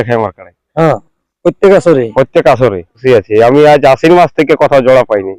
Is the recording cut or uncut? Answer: cut